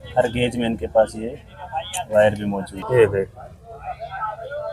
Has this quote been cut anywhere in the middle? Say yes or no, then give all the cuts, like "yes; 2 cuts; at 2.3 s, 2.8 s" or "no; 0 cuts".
yes; 1 cut; at 2.8 s